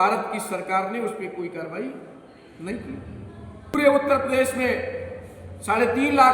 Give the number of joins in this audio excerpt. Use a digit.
1